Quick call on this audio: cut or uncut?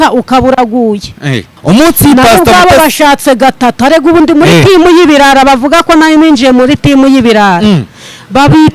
cut